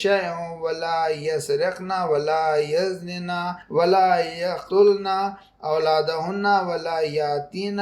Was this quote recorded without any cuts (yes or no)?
no